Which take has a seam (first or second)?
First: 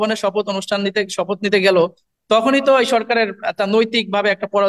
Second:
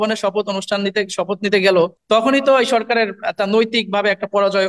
second